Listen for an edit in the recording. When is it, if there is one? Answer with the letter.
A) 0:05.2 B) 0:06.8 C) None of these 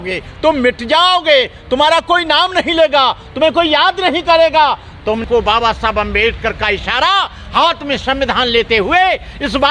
A